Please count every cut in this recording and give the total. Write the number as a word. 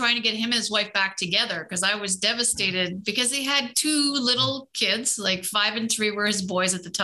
zero